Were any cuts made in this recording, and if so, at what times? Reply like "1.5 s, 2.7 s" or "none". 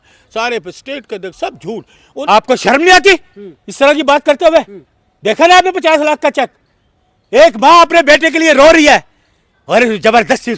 2.3 s

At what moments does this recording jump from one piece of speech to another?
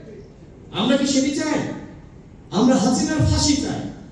none

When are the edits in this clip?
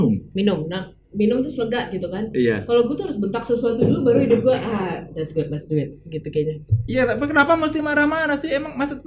none

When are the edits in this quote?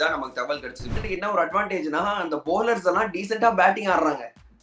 0.9 s

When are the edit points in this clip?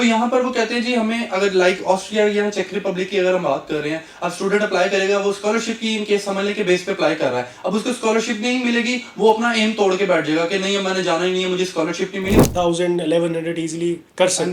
12.5 s

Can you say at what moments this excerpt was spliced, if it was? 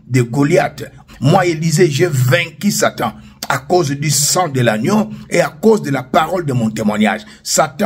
1.0 s

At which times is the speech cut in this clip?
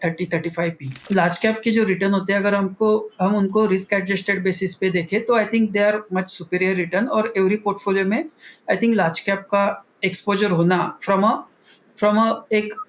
1.0 s

